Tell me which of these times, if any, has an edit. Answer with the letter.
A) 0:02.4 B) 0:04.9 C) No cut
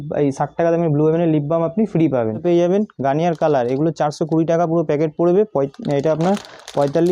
A